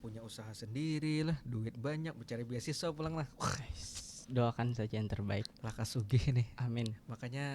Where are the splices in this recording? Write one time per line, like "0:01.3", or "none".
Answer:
none

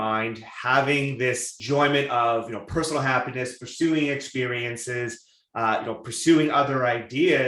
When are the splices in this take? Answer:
0:01.5

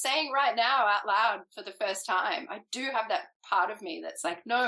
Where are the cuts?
0:03.3

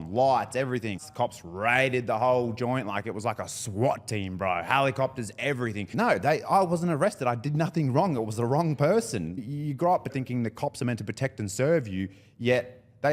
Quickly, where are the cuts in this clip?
0:01.1
0:05.8
0:09.4
0:10.1

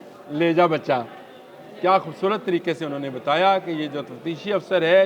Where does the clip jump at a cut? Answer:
none

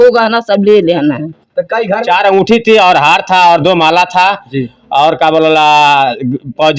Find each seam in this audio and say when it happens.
0:02.0

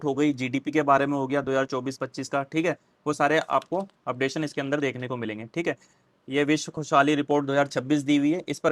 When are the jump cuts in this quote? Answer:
none

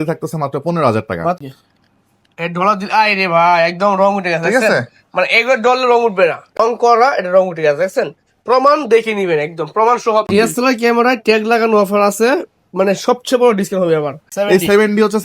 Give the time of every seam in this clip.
0:01.4
0:06.6
0:10.3
0:14.3

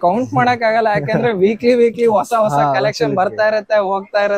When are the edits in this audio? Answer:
none

